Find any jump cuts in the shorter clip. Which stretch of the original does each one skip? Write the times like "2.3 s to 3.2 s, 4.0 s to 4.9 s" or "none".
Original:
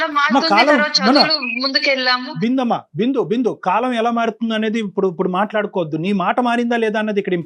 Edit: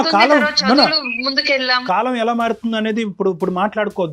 2.2 s to 3.6 s